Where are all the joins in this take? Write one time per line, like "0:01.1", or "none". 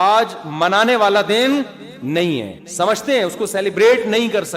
0:02.6